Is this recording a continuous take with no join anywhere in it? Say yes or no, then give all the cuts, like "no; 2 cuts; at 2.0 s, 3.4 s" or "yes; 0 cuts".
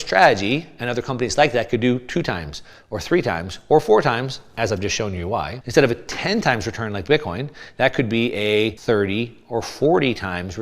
no; 2 cuts; at 5.6 s, 8.8 s